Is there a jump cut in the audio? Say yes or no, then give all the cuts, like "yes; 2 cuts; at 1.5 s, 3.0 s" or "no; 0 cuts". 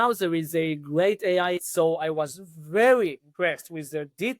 yes; 2 cuts; at 1.6 s, 3.2 s